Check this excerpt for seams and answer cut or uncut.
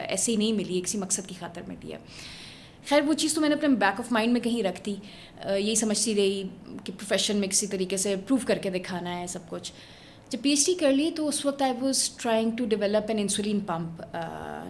uncut